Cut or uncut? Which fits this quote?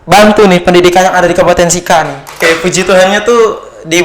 cut